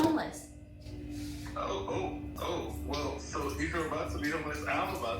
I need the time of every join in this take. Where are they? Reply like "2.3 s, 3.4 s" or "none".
2.3 s